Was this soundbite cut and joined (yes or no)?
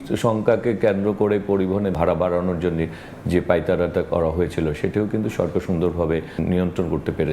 yes